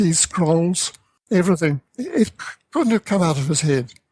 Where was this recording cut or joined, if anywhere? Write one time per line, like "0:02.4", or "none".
0:01.3
0:01.8